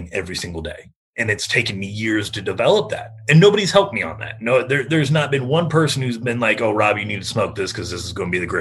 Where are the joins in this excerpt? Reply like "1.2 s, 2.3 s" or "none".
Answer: none